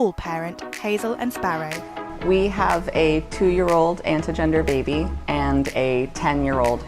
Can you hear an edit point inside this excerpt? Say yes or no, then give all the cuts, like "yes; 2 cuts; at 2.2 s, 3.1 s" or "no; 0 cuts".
no; 0 cuts